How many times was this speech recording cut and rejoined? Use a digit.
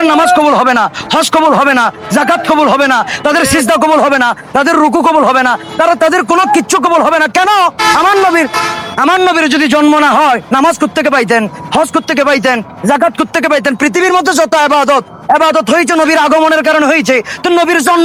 0